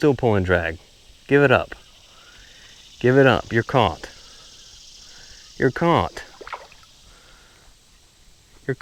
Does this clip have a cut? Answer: no; 0 cuts

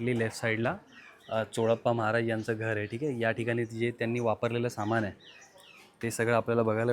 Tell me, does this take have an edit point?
no; 0 cuts

